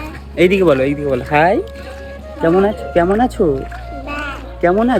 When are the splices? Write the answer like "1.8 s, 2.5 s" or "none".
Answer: none